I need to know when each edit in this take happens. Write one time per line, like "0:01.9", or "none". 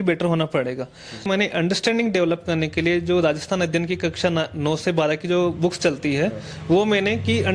0:01.3

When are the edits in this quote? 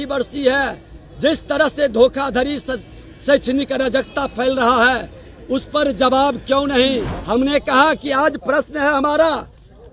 0:07.1

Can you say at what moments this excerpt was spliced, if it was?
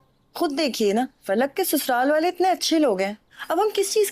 none

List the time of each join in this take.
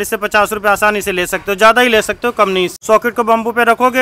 0:02.8

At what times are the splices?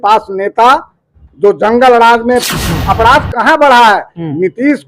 0:02.5

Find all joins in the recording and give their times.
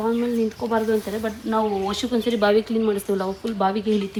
none

